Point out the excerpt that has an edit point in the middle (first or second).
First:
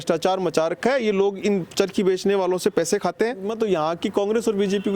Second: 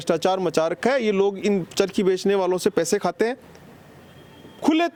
first